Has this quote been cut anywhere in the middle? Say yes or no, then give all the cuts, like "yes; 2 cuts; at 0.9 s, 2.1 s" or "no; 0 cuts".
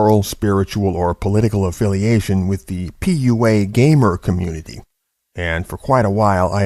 no; 0 cuts